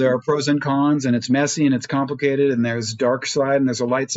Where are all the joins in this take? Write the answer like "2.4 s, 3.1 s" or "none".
none